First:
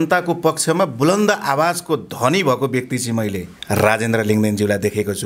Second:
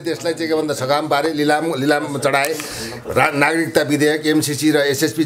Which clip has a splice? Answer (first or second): first